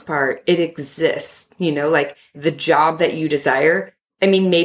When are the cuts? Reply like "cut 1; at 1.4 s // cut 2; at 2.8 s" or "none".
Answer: cut 1; at 2.4 s